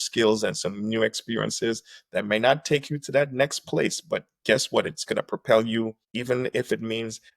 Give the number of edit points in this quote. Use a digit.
1